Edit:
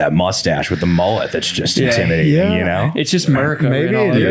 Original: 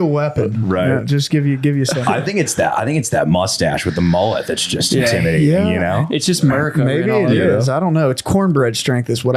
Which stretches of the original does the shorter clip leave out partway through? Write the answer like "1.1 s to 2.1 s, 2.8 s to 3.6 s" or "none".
none